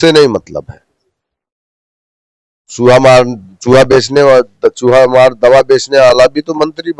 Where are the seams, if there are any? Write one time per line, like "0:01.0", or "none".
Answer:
none